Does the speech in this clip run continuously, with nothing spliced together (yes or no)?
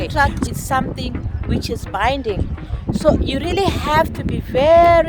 yes